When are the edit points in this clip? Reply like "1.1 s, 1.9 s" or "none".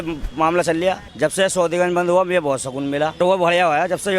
1.1 s, 3.2 s